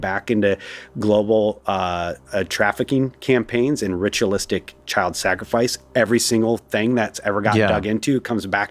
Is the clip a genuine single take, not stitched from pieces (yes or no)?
yes